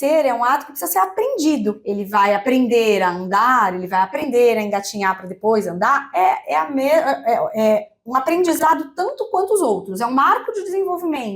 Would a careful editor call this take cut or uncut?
cut